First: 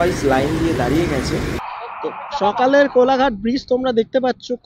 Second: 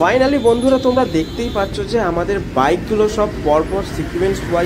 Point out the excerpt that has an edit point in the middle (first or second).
first